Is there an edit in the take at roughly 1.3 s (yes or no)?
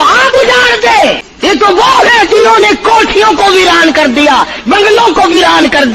yes